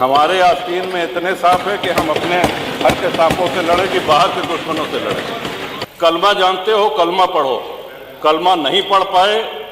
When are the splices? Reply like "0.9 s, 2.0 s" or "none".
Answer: 5.8 s